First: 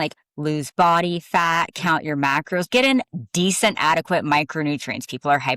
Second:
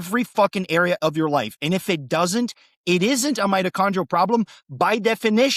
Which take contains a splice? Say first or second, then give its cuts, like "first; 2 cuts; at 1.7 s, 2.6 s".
first; 1 cut; at 2.7 s